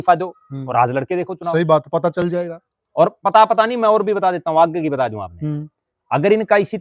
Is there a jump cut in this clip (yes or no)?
no